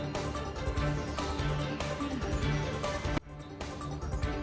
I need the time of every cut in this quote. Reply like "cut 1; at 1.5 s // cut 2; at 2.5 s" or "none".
cut 1; at 1.6 s

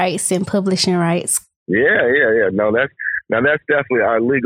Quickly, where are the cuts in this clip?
none

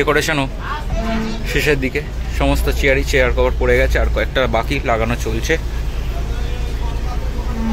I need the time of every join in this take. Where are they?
none

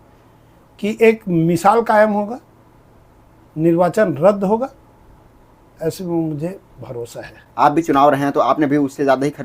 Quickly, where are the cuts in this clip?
cut 1; at 7.4 s

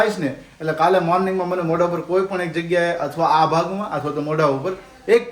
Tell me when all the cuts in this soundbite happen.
none

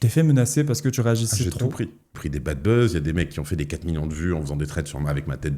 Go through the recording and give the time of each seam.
cut 1; at 2.1 s

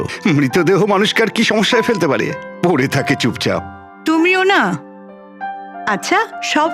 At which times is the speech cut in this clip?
none

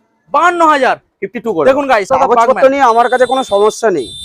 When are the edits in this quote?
cut 1; at 2.1 s

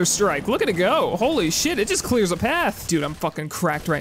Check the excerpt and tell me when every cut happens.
none

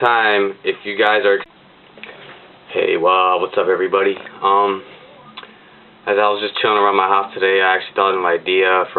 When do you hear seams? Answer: none

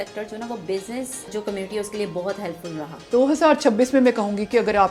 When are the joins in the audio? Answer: cut 1; at 1.3 s // cut 2; at 3.0 s

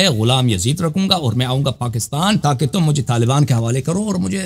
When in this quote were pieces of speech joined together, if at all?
cut 1; at 2.4 s

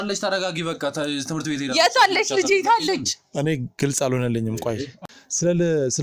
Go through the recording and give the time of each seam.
cut 1; at 5.0 s

